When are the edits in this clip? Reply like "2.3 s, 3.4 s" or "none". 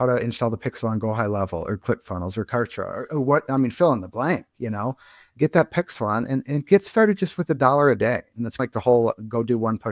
8.6 s